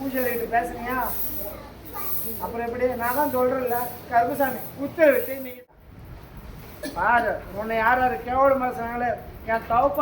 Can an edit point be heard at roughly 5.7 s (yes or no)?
yes